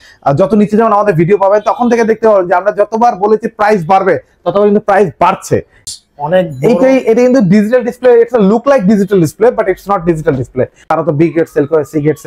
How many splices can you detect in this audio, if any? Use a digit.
2